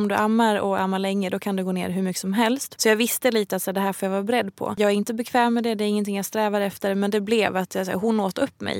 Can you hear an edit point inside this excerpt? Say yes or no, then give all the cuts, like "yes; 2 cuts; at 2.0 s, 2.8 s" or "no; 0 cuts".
yes; 2 cuts; at 2.7 s, 4.7 s